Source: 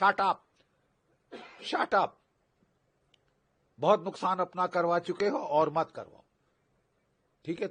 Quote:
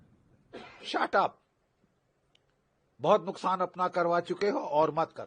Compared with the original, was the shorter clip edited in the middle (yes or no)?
no